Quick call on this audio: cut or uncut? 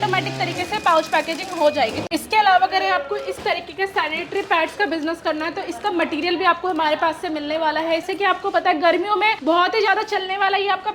cut